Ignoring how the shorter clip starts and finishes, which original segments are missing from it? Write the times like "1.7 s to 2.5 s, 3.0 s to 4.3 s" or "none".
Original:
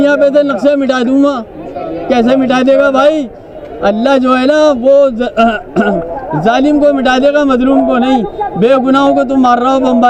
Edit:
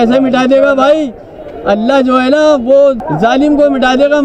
5.2 s to 6.2 s